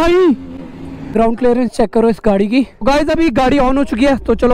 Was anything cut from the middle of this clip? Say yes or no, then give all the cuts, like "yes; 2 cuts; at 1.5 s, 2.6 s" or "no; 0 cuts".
yes; 2 cuts; at 1.1 s, 2.8 s